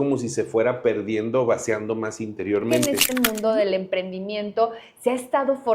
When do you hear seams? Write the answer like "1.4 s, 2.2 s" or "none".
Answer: 2.8 s